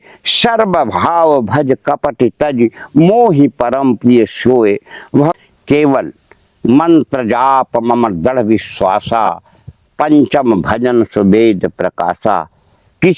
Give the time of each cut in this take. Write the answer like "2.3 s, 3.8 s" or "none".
5.3 s